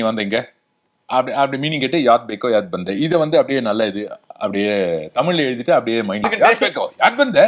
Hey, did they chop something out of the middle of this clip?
yes; 1 cut; at 6.3 s

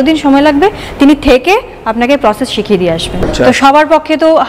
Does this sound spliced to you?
yes; 1 cut; at 3.3 s

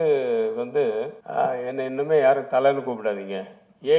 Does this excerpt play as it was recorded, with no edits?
no; 1 cut; at 1.2 s

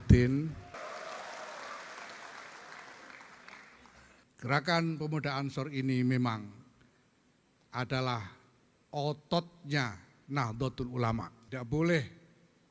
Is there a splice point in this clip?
yes; 3 cuts; at 0.7 s, 4.2 s, 11.4 s

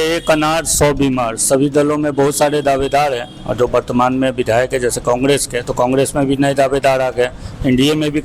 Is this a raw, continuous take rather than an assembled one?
yes; 0 cuts

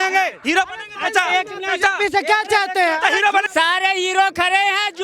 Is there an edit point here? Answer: yes; 1 cut; at 3.5 s

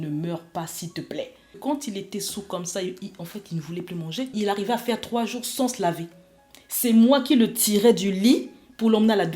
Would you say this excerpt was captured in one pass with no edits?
no; 2 cuts; at 1.6 s, 4.3 s

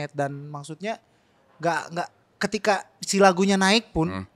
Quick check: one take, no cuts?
yes; 0 cuts

